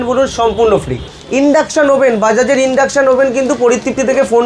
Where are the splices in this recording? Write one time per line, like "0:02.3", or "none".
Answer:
0:01.0